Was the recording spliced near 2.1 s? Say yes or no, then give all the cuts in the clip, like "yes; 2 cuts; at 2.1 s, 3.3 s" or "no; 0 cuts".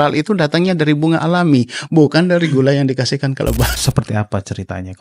no; 1 cut; at 3.7 s